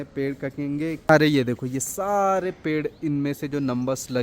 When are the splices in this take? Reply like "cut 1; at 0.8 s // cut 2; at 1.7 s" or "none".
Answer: cut 1; at 1.1 s